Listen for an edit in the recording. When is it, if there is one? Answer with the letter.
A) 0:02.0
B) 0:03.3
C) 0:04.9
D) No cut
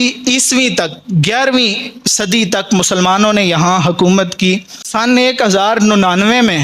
C